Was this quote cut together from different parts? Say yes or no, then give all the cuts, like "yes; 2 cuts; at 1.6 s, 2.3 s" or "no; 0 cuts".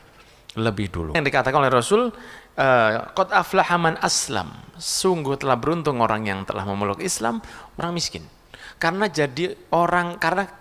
yes; 2 cuts; at 1.1 s, 7.8 s